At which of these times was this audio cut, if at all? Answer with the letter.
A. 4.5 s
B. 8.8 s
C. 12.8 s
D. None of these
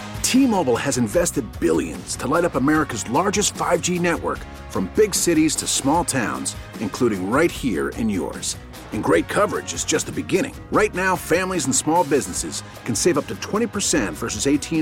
D